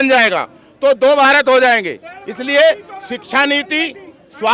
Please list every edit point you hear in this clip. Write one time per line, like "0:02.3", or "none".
none